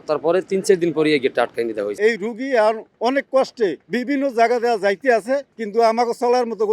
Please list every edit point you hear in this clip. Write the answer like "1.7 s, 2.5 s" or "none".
1.9 s, 3.9 s, 5.6 s